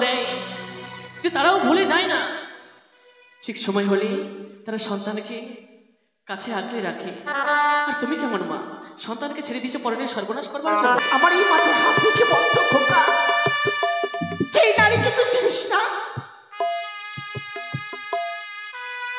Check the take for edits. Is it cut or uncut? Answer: cut